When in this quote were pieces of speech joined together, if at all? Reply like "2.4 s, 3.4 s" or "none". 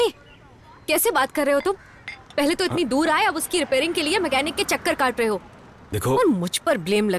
none